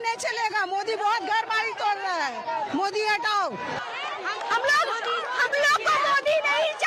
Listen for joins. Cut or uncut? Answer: uncut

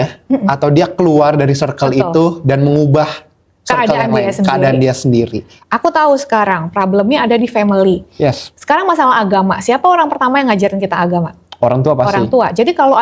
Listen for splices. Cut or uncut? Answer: cut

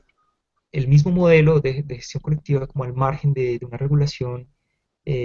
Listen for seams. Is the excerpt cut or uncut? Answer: cut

